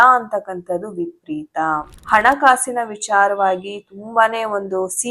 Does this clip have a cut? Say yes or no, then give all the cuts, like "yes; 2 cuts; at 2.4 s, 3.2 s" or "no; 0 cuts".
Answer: yes; 1 cut; at 1.9 s